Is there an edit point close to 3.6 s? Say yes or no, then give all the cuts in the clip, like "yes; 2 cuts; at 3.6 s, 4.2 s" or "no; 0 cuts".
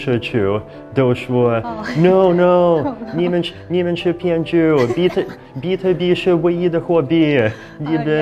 no; 0 cuts